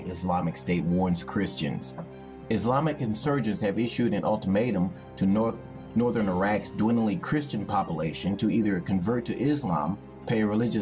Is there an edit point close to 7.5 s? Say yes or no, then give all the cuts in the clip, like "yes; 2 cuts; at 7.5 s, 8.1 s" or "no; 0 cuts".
yes; 1 cut; at 7.5 s